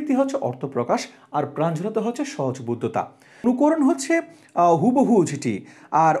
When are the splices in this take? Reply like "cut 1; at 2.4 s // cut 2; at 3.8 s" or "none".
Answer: cut 1; at 3.4 s